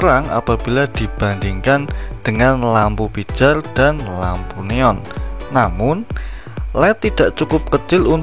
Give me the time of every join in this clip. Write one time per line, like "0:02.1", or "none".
none